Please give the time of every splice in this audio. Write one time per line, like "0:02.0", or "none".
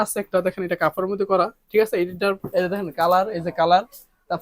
0:02.4